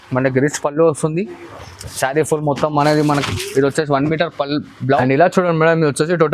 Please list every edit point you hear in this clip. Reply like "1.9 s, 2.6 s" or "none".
5.0 s